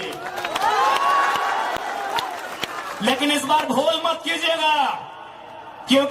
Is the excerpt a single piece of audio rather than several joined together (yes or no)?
yes